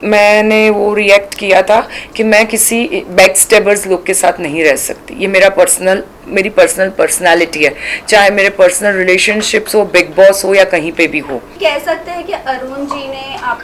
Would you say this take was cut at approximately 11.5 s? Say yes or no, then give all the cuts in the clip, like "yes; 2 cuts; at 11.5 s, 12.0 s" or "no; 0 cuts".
yes; 1 cut; at 11.5 s